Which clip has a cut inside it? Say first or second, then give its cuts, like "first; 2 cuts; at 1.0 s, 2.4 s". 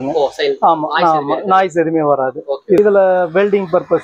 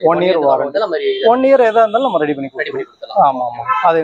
first; 1 cut; at 2.8 s